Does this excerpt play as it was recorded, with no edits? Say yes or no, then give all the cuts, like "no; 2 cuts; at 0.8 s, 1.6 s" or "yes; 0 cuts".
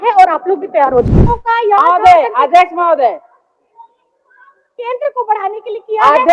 no; 1 cut; at 1.0 s